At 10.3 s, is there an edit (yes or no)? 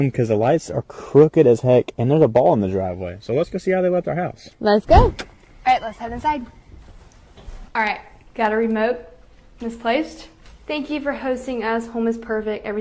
yes